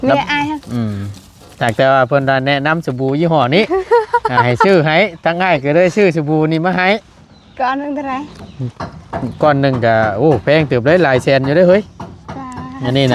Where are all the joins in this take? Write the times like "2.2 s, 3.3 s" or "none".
none